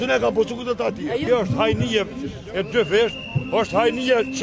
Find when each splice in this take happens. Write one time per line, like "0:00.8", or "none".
0:01.3